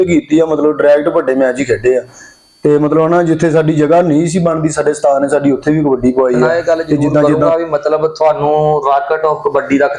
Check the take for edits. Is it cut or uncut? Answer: cut